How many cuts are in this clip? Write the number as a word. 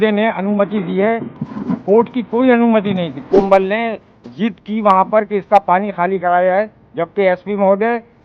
one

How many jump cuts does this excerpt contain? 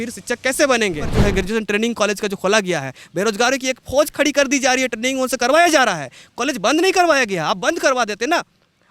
one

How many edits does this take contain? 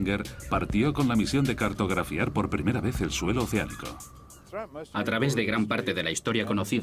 zero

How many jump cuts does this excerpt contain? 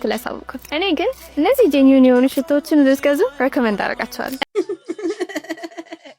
one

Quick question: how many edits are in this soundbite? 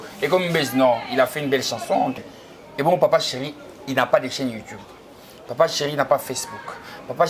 one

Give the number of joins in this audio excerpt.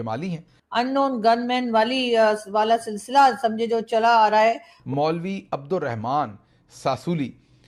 zero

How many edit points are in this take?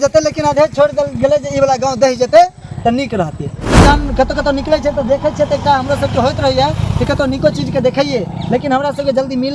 one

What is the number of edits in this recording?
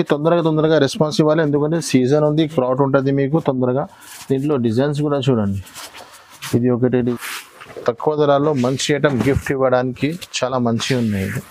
one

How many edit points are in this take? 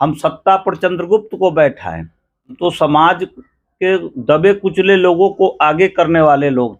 one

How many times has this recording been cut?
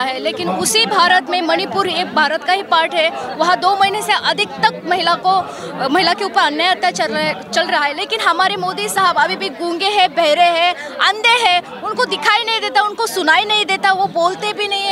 zero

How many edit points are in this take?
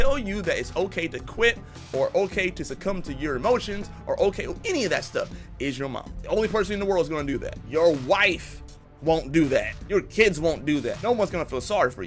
four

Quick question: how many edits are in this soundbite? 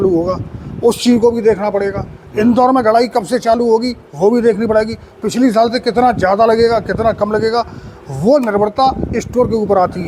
zero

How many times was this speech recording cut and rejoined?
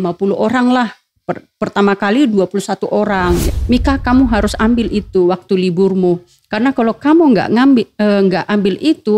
one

